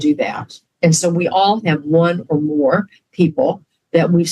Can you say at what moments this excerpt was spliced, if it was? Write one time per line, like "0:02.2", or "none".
none